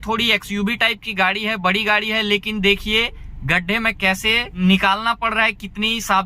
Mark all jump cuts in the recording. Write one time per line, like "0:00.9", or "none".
0:04.5